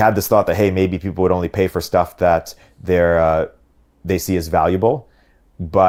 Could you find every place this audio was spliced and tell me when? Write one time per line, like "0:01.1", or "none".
none